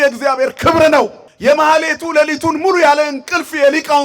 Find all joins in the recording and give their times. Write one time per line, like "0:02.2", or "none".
0:01.2